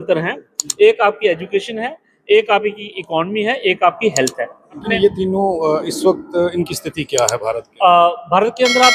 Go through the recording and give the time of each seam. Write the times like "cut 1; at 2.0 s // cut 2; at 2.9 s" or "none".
cut 1; at 4.8 s